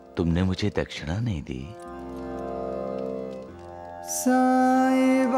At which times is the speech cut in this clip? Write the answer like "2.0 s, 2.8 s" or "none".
1.9 s, 3.4 s